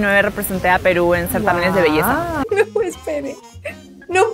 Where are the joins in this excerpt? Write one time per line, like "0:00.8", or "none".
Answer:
0:02.5